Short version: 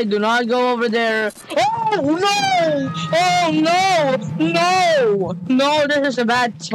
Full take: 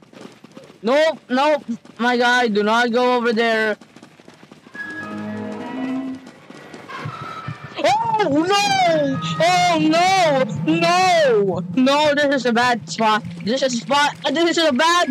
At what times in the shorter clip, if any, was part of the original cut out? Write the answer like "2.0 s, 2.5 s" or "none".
1.4 s